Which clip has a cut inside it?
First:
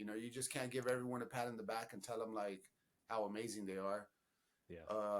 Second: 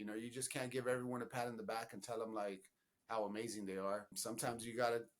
second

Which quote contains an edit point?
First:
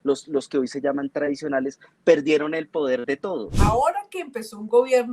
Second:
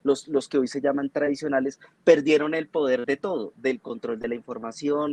first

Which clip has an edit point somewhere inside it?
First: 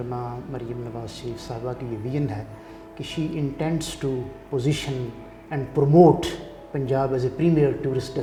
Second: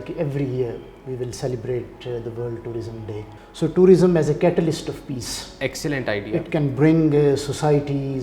second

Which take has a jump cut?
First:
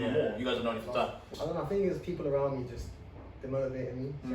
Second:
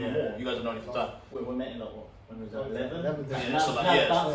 first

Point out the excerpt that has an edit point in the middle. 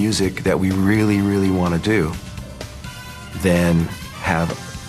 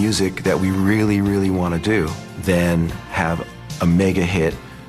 second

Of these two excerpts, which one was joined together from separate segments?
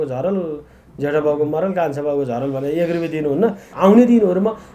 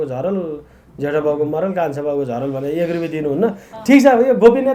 first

